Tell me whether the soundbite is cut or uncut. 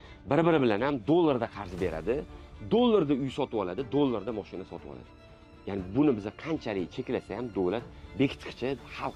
uncut